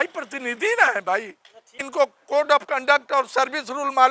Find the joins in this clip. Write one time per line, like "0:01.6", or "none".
0:01.8

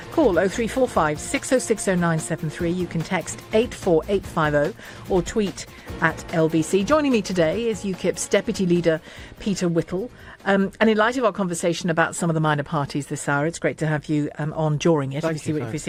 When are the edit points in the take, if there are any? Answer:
none

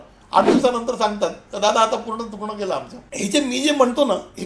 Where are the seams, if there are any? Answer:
0:03.0

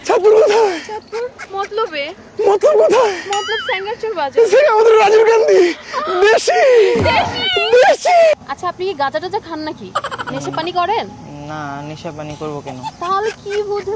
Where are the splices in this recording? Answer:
0:08.4

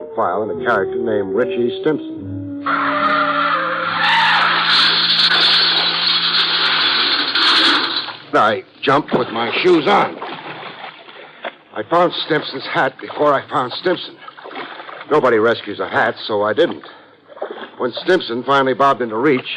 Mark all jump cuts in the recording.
none

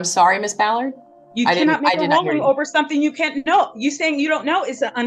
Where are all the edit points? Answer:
none

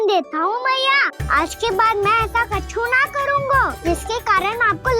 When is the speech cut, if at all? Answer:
0:01.2
0:03.8

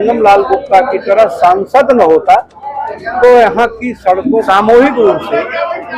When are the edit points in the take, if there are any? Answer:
0:04.4

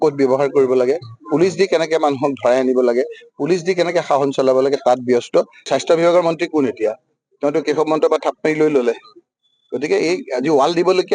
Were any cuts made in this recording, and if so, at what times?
0:05.6

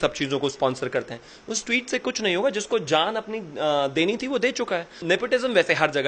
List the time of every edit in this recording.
0:05.0

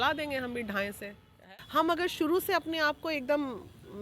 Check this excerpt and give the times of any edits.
0:01.4

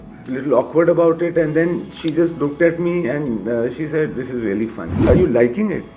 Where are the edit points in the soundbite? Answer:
0:05.1

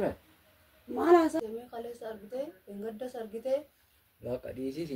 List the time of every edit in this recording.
0:01.4

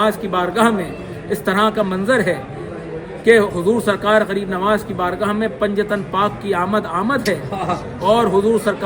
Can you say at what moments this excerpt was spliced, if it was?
none

